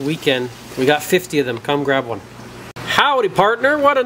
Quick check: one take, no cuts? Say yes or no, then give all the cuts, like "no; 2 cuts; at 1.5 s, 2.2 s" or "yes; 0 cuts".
no; 1 cut; at 2.6 s